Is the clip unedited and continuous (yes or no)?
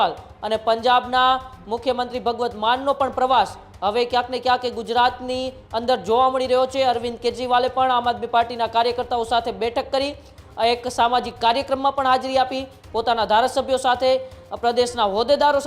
yes